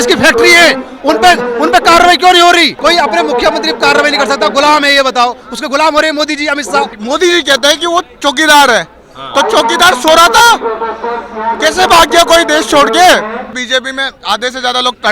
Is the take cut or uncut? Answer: cut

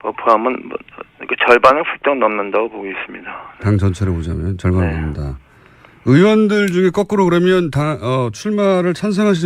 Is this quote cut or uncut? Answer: uncut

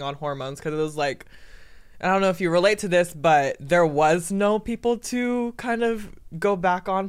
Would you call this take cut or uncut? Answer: uncut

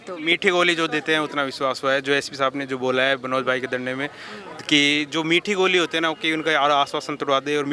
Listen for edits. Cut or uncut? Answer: uncut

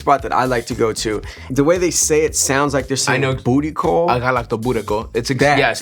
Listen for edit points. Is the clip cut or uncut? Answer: uncut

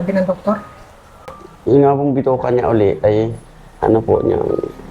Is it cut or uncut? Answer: uncut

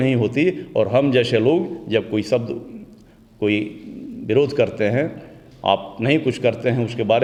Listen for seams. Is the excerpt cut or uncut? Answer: uncut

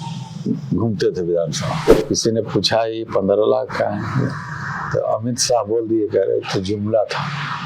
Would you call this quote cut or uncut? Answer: cut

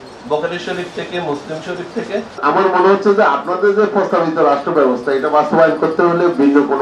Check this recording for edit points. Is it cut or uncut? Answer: cut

